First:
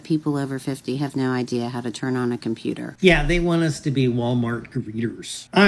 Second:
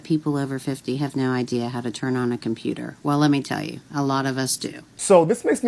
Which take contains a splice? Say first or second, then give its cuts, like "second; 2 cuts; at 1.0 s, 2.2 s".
first; 1 cut; at 2.9 s